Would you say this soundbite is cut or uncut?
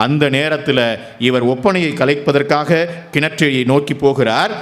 uncut